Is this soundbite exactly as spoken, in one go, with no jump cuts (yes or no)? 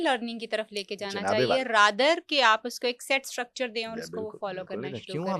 yes